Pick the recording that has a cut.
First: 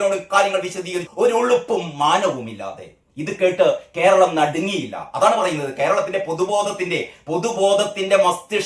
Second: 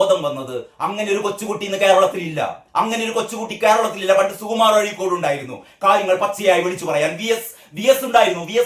first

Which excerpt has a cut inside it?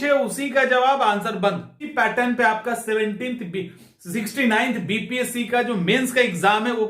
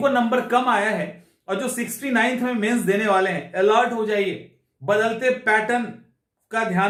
first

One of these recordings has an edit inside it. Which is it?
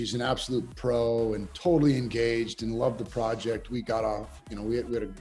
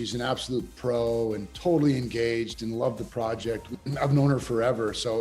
second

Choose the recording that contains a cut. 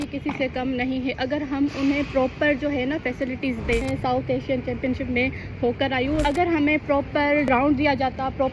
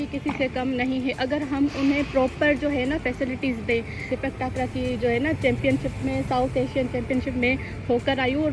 first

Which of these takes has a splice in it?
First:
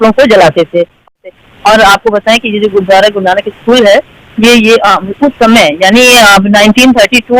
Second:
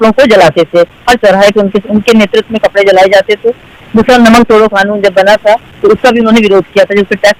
first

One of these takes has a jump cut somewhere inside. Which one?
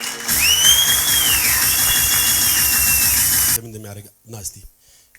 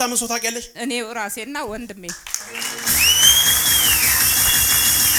first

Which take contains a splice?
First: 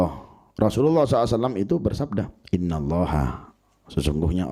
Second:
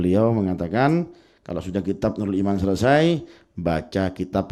first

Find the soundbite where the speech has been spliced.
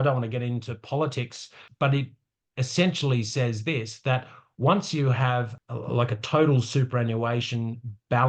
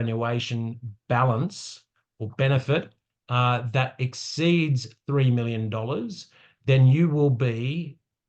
first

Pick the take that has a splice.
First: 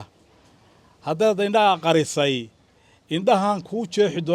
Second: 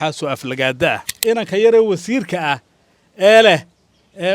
second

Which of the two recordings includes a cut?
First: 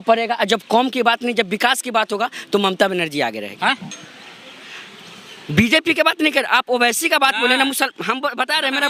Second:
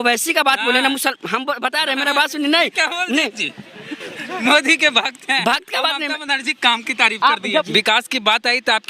second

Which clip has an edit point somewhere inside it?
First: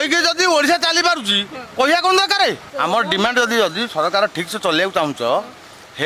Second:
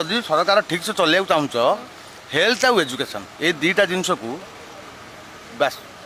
first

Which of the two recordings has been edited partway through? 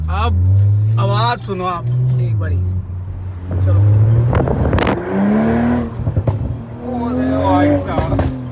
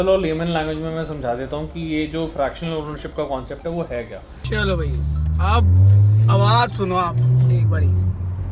second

